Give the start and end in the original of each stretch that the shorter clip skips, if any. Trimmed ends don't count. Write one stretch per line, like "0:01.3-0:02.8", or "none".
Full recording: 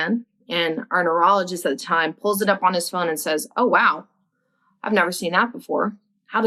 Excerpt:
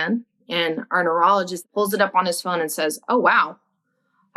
0:01.6-0:02.1

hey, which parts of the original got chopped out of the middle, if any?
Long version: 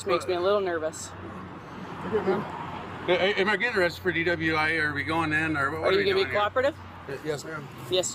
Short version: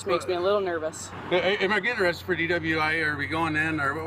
0:01.1-0:02.9

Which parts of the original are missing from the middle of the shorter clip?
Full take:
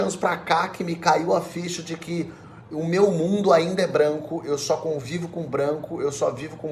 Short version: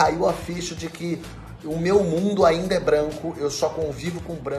none

